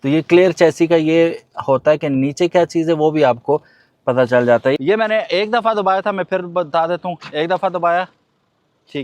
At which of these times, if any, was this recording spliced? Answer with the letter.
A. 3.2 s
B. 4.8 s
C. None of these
B